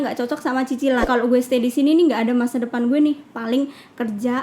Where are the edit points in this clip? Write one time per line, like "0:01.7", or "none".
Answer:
0:01.0